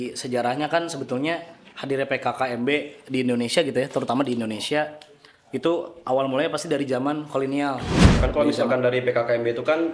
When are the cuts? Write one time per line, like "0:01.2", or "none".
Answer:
0:08.2